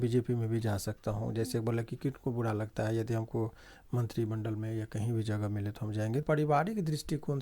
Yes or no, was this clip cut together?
yes